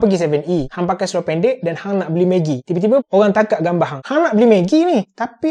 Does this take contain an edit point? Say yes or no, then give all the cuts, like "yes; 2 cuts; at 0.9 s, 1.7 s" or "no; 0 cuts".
yes; 2 cuts; at 3.1 s, 4.0 s